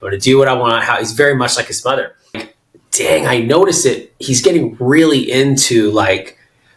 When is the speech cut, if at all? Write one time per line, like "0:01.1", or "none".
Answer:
0:02.5